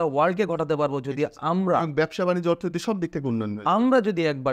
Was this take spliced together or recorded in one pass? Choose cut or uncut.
uncut